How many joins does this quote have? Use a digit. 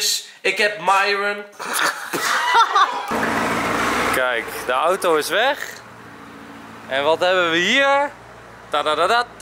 1